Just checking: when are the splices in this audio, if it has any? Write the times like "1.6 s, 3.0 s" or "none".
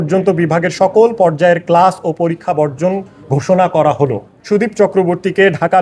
4.3 s